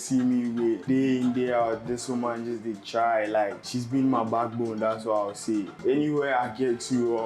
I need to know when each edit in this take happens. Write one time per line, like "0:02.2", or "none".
0:00.8
0:03.6
0:05.7